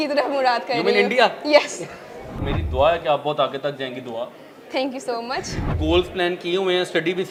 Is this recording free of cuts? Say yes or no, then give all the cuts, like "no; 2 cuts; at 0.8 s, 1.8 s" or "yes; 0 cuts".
yes; 0 cuts